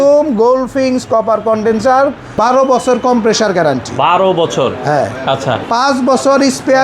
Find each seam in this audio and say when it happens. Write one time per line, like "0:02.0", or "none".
0:02.2